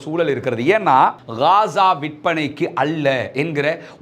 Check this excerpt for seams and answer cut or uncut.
cut